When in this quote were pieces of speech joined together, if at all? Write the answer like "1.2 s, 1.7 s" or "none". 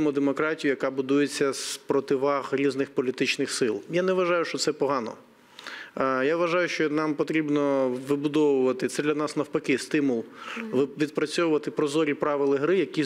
none